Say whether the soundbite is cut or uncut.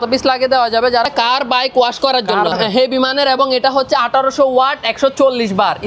cut